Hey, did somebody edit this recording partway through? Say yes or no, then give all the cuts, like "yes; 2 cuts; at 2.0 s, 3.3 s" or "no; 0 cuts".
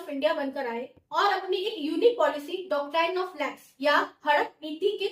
no; 0 cuts